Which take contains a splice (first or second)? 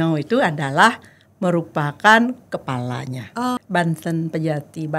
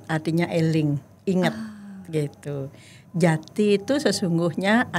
first